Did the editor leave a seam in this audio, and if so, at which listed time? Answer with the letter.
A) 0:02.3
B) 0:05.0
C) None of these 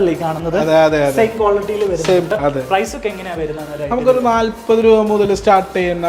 A